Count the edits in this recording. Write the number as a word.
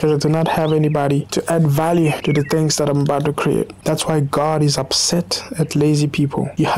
zero